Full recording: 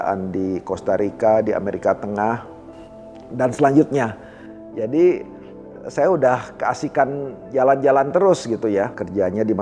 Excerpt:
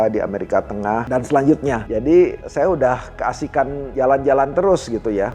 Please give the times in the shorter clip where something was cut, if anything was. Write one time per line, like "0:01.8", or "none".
0:01.1
0:01.8
0:02.4
0:03.8